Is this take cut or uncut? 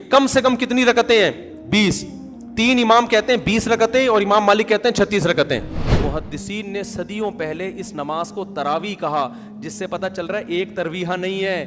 cut